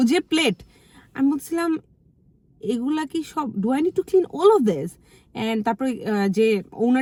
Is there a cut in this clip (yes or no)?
no